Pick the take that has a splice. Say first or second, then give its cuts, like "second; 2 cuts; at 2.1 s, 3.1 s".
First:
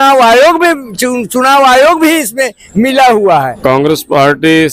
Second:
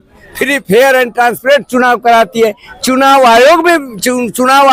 first; 1 cut; at 3.5 s